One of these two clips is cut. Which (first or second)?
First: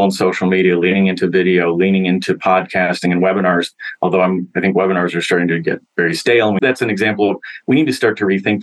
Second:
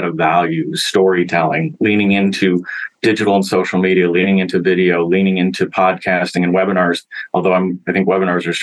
first